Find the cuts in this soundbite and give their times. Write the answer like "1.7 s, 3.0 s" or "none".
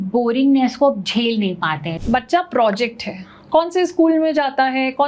1.9 s